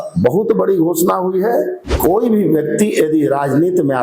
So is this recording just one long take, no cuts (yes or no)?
no